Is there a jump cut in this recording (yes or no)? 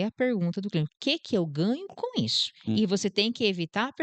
no